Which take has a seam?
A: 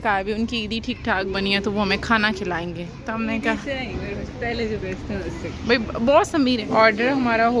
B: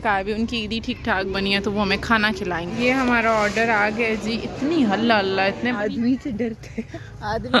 B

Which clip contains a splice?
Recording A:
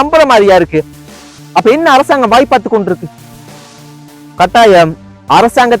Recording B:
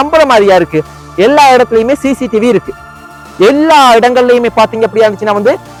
A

